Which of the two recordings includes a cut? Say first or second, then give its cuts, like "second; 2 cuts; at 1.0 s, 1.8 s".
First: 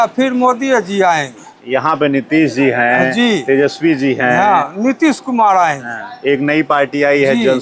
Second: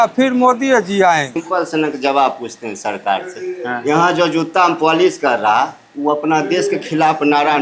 second; 1 cut; at 1.4 s